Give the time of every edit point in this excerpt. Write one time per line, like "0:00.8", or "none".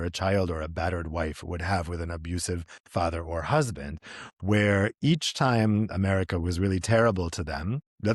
none